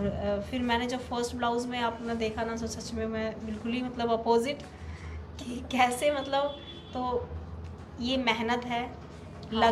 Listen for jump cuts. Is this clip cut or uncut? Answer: uncut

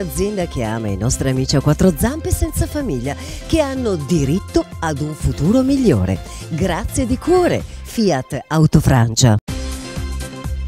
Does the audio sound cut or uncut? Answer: cut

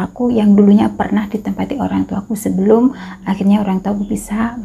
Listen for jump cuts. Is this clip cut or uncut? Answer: uncut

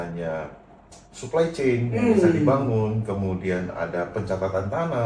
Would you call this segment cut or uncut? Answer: uncut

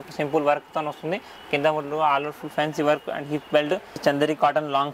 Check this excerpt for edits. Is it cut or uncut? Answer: cut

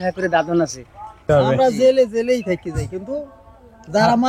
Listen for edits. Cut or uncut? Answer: cut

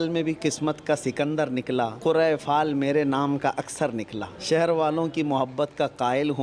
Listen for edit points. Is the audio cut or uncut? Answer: cut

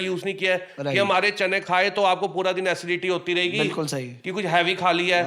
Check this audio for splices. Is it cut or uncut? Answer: uncut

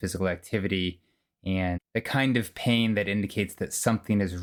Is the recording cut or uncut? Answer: uncut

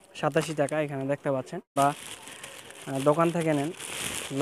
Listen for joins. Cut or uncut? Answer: cut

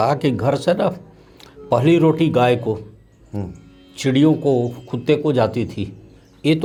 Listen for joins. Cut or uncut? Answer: uncut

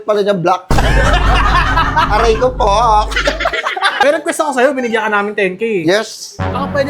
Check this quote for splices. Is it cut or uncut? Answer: cut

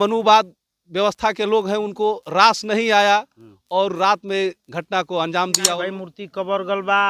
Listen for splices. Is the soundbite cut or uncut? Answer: cut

